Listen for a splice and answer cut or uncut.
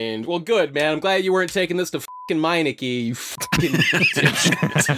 uncut